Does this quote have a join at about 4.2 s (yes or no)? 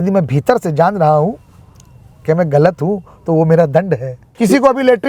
yes